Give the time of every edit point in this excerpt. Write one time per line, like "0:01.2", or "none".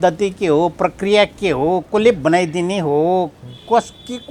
none